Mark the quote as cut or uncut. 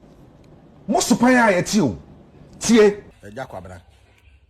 cut